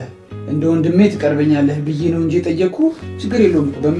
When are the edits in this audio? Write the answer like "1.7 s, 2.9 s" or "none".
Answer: none